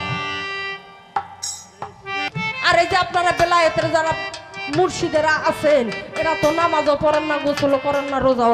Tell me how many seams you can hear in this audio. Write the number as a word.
one